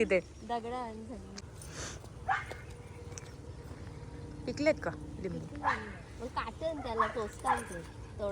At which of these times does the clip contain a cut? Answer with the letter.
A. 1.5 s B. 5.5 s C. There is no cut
A